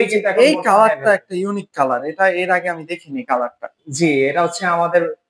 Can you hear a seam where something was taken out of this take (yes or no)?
no